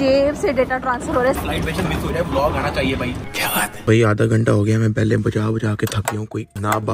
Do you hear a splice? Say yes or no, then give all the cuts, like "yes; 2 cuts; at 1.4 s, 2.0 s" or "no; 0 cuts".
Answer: yes; 2 cuts; at 1.4 s, 3.7 s